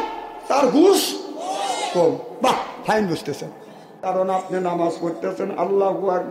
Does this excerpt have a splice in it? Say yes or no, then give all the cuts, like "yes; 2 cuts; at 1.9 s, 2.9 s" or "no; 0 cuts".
yes; 1 cut; at 4.0 s